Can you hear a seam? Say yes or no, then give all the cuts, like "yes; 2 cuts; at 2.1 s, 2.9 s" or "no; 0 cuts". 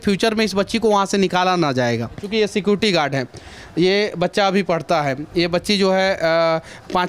yes; 1 cut; at 2.2 s